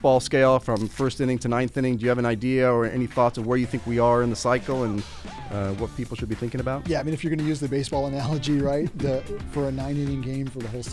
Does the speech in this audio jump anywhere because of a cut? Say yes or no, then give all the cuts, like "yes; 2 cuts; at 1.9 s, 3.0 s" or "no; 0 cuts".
no; 0 cuts